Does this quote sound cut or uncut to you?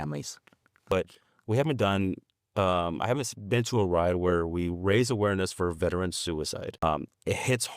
cut